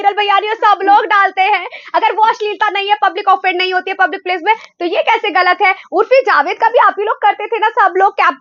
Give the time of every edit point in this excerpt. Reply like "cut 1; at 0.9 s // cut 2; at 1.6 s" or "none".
none